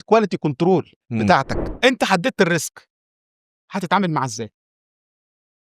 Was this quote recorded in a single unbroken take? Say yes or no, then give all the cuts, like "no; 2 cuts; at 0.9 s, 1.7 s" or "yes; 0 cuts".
no; 1 cut; at 1.6 s